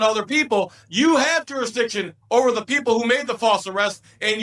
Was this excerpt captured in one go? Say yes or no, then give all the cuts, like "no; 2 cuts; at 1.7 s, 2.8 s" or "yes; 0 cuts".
yes; 0 cuts